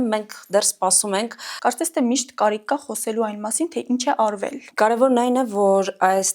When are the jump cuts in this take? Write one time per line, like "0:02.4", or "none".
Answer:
0:01.5
0:04.6